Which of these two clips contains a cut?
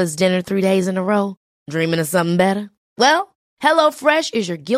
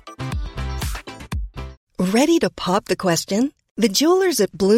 second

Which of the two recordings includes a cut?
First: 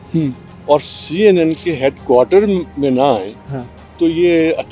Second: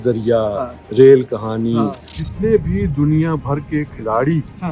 second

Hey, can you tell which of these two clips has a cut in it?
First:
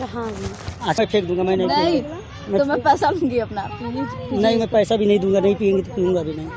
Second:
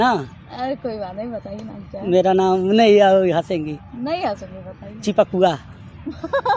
first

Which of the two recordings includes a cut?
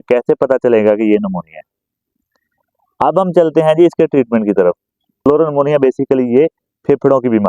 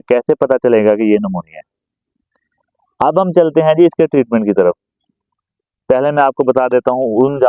first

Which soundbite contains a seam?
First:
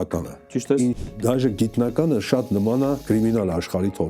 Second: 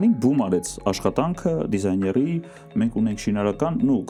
first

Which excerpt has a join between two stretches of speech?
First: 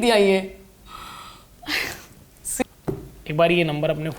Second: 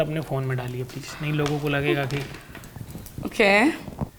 first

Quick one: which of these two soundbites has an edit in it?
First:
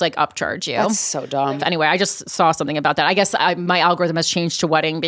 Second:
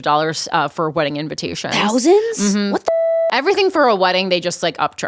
first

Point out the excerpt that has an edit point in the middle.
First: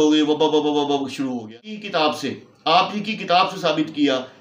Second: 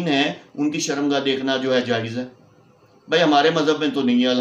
first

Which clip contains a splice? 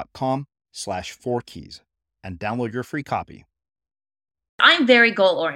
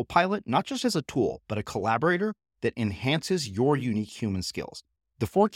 first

